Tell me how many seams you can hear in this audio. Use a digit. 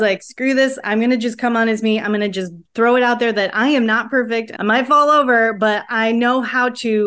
1